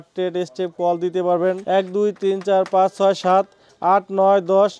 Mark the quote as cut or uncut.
cut